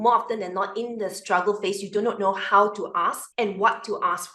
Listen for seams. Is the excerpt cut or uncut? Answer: cut